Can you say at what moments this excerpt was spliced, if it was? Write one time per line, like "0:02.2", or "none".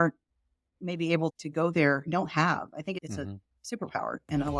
0:01.4
0:03.0